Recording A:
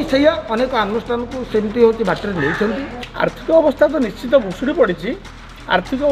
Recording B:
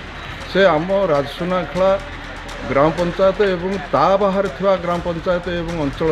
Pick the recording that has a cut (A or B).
A